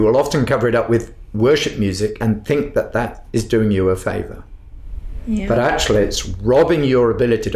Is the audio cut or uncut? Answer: cut